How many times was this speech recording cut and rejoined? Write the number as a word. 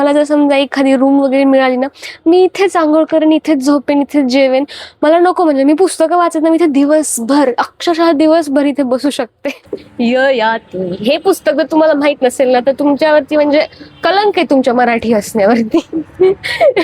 one